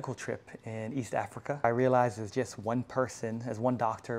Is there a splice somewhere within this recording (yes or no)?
yes